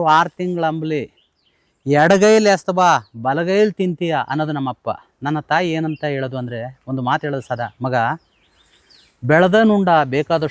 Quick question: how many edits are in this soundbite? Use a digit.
0